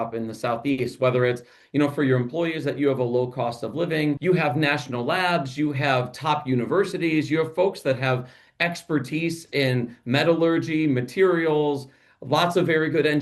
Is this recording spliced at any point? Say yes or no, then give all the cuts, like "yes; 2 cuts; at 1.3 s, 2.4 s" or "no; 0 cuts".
yes; 1 cut; at 4.2 s